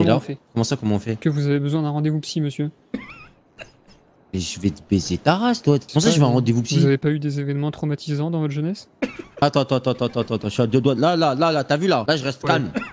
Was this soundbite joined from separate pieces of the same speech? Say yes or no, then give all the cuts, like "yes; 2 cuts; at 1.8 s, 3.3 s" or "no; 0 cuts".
yes; 2 cuts; at 5.9 s, 12.0 s